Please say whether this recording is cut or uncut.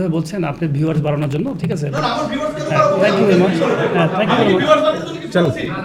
uncut